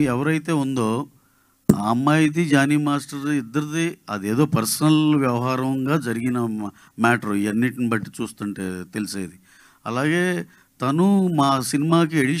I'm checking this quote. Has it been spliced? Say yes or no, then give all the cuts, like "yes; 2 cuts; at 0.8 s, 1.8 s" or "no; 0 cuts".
no; 0 cuts